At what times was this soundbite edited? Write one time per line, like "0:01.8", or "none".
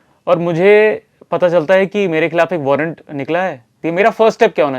0:03.8